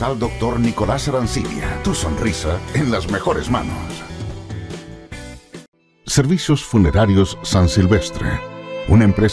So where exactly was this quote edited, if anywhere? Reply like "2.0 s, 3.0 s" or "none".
5.7 s